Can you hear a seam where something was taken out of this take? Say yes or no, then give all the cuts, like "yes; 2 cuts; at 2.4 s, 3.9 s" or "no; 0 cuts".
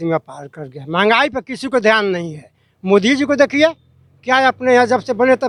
no; 0 cuts